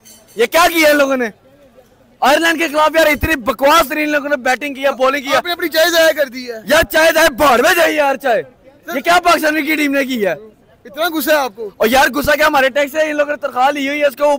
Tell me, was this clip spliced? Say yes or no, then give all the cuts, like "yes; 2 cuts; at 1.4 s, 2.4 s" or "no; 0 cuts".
no; 0 cuts